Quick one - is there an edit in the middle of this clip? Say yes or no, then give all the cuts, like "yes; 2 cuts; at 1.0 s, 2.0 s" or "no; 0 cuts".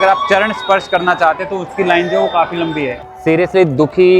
yes; 1 cut; at 3.0 s